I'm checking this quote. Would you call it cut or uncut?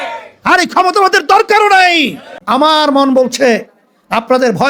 cut